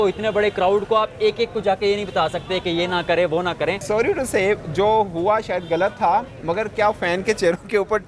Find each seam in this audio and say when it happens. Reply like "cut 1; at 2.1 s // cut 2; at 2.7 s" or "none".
cut 1; at 3.8 s